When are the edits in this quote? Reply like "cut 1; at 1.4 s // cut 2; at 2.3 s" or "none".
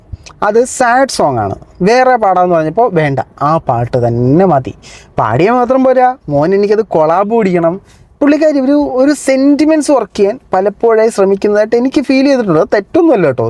none